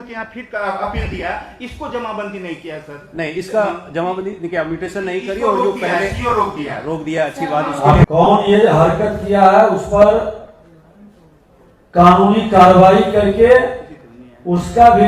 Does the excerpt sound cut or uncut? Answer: cut